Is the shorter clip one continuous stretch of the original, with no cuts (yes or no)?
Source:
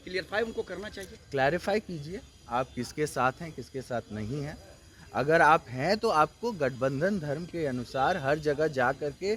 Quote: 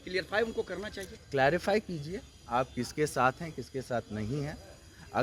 yes